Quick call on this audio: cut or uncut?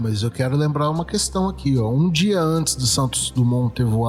uncut